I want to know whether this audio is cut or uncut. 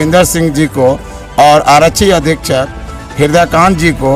uncut